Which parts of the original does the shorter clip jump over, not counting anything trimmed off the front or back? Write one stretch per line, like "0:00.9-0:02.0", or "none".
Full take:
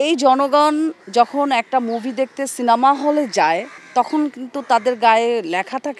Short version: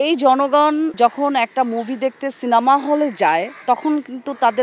0:00.9-0:01.1
0:03.7-0:03.8